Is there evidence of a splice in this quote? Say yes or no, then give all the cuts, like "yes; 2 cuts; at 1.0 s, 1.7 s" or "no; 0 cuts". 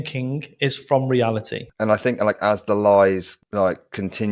yes; 1 cut; at 1.6 s